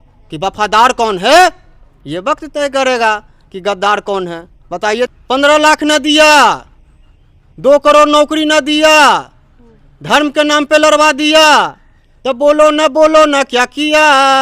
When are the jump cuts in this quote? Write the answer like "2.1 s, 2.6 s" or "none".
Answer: 5.1 s